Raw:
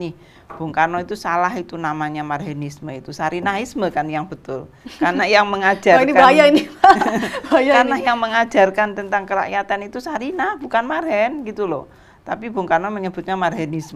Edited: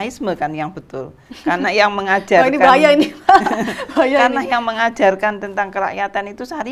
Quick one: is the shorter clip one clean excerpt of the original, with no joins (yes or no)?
yes